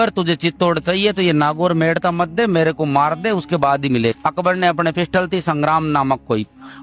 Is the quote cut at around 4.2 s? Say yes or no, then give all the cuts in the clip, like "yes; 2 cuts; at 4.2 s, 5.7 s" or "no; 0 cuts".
yes; 1 cut; at 4.2 s